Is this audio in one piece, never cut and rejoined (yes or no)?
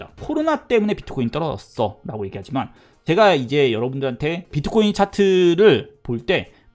no